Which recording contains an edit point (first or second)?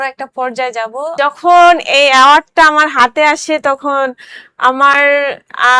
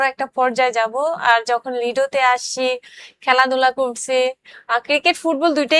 first